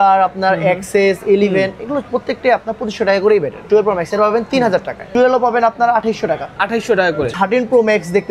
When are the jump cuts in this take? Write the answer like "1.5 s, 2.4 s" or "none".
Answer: 3.6 s, 5.1 s, 7.3 s